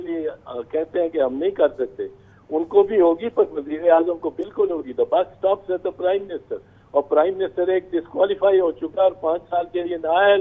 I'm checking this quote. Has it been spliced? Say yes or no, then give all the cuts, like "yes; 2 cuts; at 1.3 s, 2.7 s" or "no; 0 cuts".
no; 0 cuts